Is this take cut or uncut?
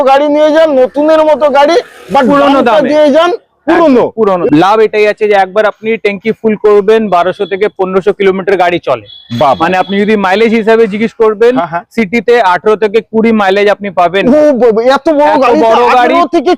cut